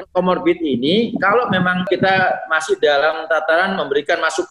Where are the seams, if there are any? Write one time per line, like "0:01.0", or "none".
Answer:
0:01.9